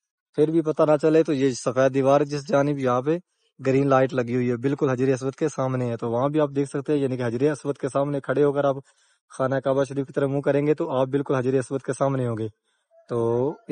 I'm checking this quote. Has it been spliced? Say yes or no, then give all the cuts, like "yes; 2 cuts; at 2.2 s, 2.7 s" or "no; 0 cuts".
no; 0 cuts